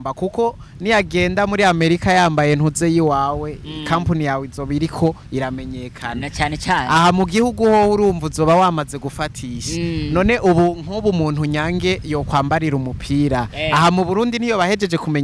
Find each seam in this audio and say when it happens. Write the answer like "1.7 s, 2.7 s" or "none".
none